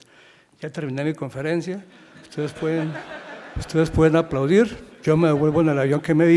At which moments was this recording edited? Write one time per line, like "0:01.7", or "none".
0:02.8

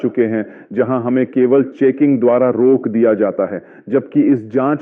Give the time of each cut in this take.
0:03.3

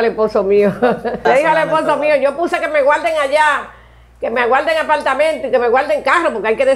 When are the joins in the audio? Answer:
0:01.2

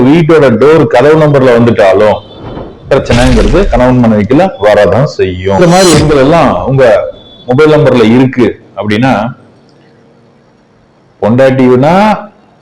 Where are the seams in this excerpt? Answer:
0:05.6

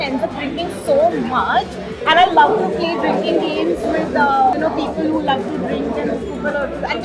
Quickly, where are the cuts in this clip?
none

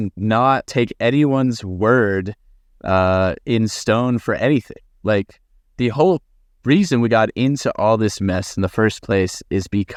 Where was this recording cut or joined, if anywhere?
none

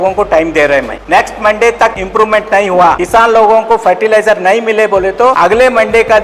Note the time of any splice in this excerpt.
0:01.0
0:02.0
0:03.0
0:05.4

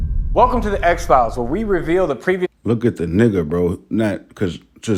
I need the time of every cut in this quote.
none

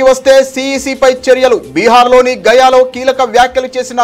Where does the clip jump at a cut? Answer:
none

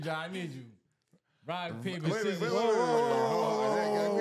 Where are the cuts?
none

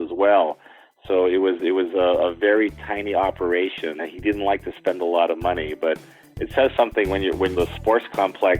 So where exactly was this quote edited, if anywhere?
0:04.0
0:07.5

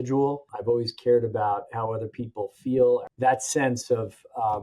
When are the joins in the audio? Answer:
0:03.1

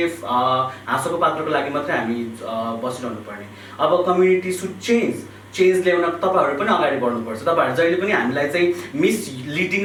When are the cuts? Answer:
none

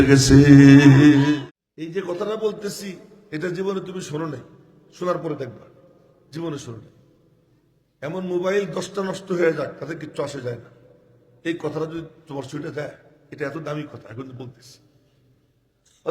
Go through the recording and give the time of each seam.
0:01.3

